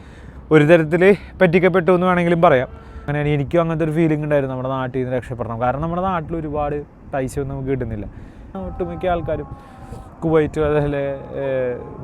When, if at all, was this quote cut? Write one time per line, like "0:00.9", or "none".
0:03.1
0:08.6